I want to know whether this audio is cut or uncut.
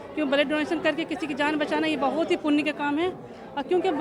uncut